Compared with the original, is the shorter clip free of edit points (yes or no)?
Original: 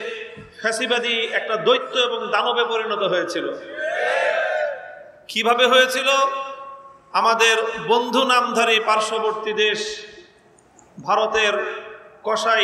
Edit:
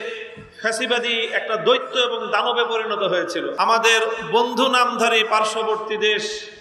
no